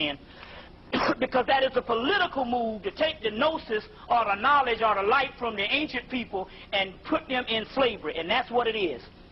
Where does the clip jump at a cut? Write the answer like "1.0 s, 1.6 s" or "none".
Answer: 1.2 s